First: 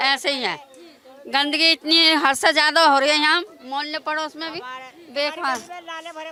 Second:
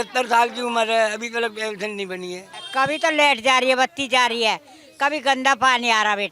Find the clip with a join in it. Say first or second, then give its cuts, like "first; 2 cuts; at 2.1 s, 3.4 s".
second; 1 cut; at 2.5 s